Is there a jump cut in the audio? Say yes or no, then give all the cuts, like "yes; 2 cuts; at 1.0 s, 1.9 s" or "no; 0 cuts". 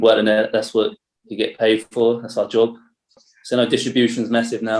no; 0 cuts